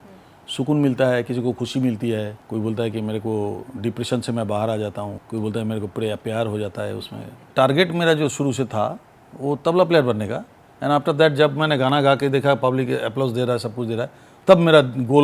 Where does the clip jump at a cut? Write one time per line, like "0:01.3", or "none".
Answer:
0:02.4
0:05.2
0:07.5